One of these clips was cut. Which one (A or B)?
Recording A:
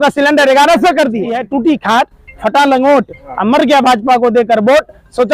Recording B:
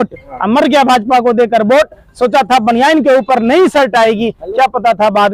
A